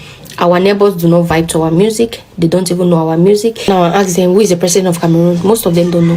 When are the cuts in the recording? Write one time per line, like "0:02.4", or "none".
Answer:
0:03.7